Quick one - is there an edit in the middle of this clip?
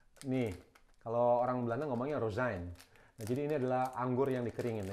no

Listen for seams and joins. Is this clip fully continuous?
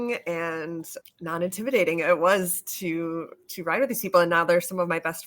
no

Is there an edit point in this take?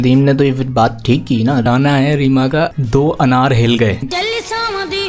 yes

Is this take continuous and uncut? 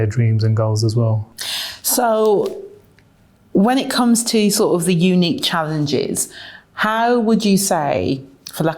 yes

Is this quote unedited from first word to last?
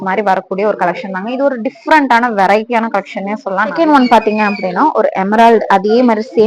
no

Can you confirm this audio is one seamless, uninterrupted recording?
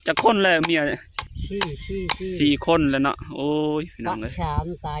no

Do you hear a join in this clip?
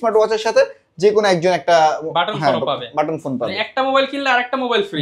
no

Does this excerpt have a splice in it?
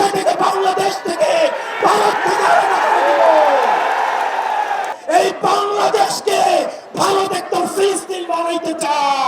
yes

